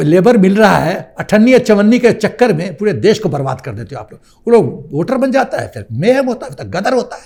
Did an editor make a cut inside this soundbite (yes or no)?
no